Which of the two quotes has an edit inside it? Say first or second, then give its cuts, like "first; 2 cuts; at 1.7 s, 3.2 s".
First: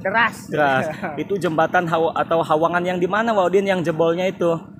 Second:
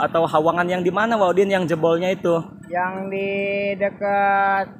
first; 1 cut; at 1.0 s